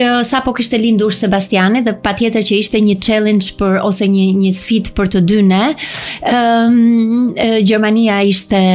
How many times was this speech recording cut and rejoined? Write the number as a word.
zero